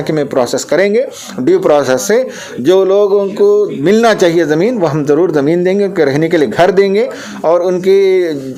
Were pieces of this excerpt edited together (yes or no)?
no